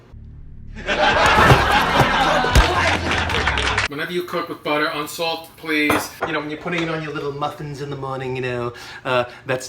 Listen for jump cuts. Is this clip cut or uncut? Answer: cut